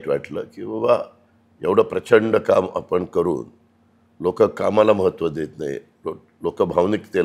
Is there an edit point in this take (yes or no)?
no